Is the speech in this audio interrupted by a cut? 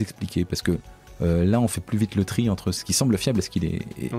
yes; 2 cuts; at 1.0 s, 2.8 s

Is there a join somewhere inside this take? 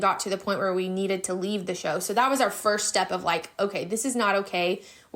no; 0 cuts

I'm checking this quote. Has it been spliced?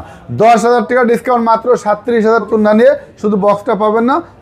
yes; 1 cut; at 2.5 s

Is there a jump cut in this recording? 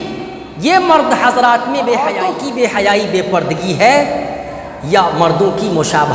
yes; 1 cut; at 2.1 s

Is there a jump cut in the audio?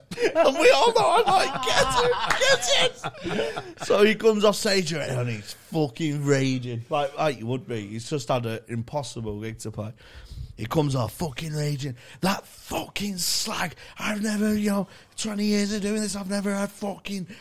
no; 0 cuts

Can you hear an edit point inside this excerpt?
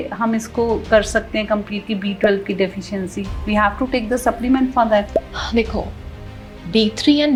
no; 0 cuts

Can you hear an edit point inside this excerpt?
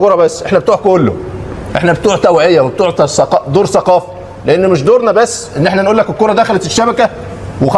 no; 0 cuts

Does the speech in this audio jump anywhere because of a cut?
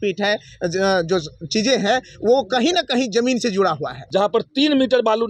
yes; 1 cut; at 3.9 s

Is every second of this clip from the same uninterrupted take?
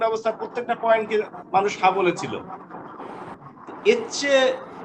no; 1 cut; at 3.2 s

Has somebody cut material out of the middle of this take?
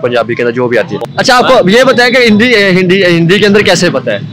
yes; 1 cut; at 1.0 s

